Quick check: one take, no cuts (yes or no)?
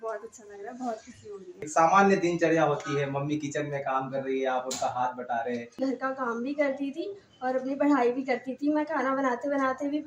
no